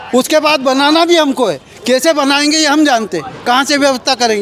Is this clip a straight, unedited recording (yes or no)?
yes